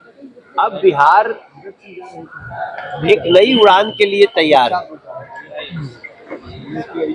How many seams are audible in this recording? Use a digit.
0